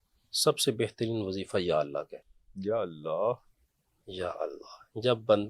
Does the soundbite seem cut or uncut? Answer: uncut